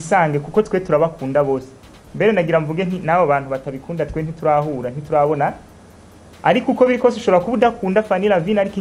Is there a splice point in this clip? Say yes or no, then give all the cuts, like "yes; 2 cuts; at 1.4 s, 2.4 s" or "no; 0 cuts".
no; 0 cuts